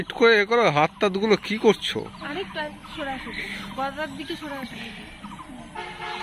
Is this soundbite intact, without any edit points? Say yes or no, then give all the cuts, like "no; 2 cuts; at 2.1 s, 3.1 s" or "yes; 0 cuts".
yes; 0 cuts